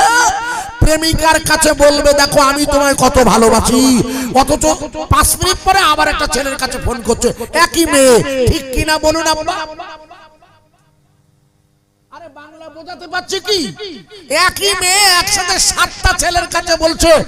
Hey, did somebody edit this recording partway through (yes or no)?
no